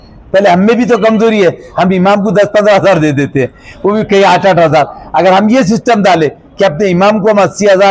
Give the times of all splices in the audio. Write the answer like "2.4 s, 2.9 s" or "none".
none